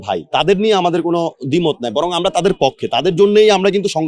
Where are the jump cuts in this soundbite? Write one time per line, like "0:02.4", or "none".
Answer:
none